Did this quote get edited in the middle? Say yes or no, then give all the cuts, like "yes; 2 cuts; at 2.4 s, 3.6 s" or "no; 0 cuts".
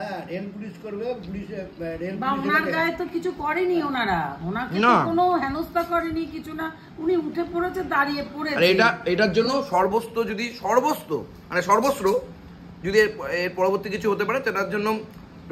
no; 0 cuts